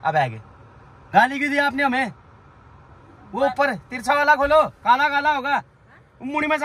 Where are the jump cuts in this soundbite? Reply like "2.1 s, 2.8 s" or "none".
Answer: none